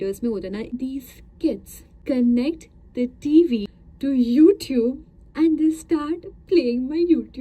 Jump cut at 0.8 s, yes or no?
yes